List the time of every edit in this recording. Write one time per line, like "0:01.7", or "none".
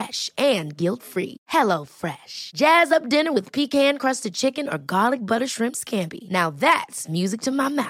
none